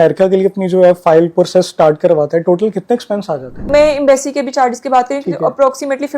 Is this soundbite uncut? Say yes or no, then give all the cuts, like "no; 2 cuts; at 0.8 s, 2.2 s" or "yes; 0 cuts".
no; 1 cut; at 3.6 s